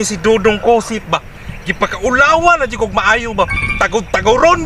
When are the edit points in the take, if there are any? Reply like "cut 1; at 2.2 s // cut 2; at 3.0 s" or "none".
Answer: none